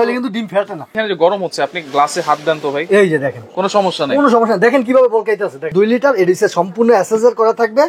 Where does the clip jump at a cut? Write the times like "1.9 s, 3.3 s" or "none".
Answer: 1.0 s, 5.7 s